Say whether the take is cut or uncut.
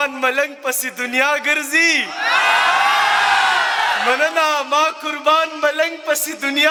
uncut